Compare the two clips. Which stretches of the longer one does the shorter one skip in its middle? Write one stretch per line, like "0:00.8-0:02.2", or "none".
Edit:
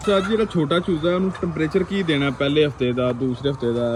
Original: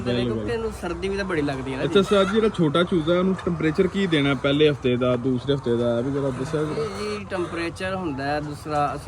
none